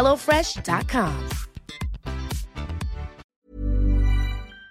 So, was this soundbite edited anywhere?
yes; 1 cut; at 3.2 s

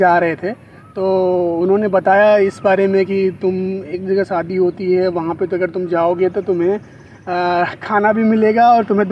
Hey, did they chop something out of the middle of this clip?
no; 0 cuts

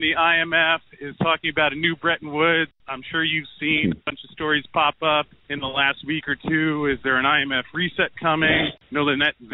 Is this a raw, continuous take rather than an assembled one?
no; 3 cuts; at 2.8 s, 5.4 s, 8.7 s

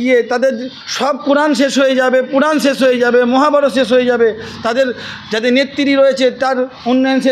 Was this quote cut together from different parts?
no; 0 cuts

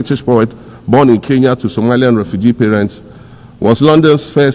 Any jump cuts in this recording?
no; 0 cuts

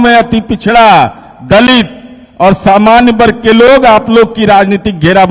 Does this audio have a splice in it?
no; 0 cuts

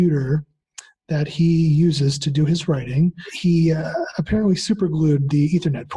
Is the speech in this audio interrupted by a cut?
yes; 1 cut; at 3.3 s

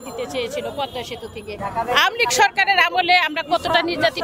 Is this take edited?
yes; 1 cut; at 1.5 s

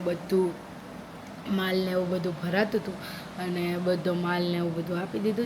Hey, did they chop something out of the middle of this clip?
no; 0 cuts

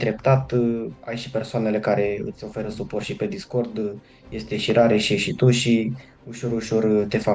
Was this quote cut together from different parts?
no; 0 cuts

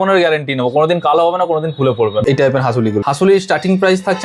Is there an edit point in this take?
yes; 2 cuts; at 2.2 s, 3.0 s

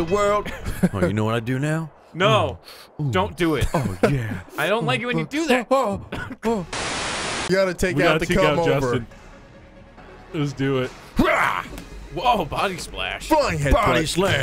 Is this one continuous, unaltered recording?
yes; 0 cuts

